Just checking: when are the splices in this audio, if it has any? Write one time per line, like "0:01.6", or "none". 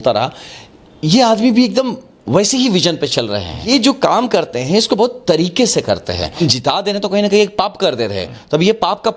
0:03.7
0:06.4